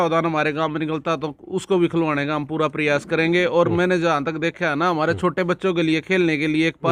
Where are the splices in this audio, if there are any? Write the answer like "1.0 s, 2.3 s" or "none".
none